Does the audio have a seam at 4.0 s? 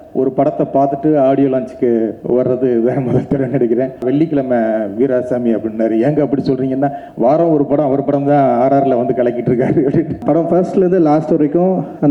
yes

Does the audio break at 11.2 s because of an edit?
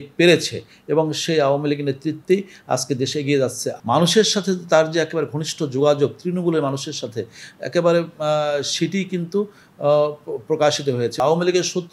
yes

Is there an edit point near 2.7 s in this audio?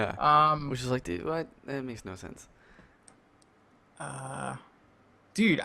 yes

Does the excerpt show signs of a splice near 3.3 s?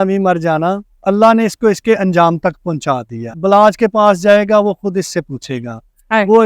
yes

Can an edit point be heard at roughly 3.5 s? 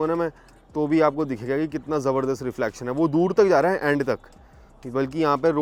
no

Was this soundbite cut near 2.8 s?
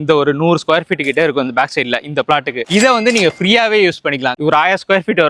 no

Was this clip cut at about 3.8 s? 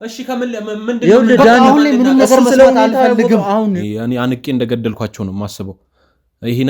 yes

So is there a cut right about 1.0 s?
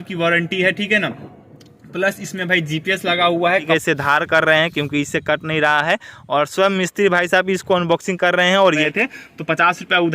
no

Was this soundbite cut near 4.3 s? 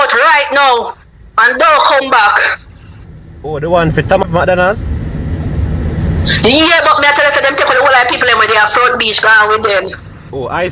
yes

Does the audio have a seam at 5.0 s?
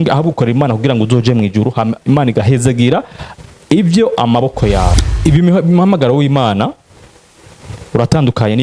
yes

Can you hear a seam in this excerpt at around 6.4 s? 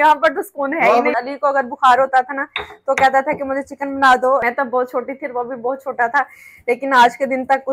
no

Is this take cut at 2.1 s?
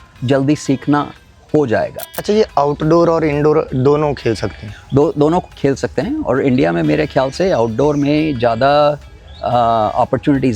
yes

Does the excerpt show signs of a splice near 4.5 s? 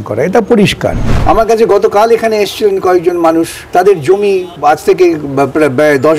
yes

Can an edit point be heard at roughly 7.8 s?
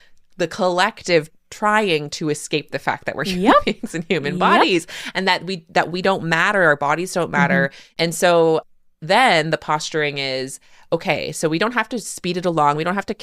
yes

